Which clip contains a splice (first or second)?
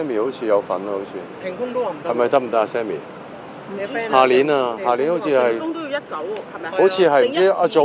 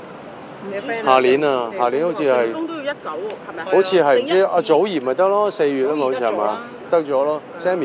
second